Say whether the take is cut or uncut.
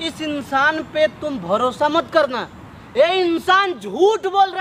uncut